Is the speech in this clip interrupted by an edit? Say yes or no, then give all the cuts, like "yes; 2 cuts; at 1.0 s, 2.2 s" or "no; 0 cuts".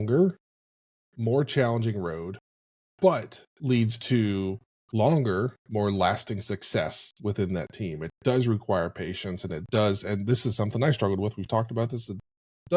no; 0 cuts